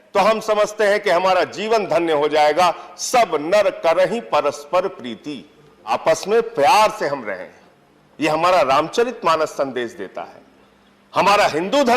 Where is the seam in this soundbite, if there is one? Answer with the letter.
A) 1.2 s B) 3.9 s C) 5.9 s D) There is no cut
C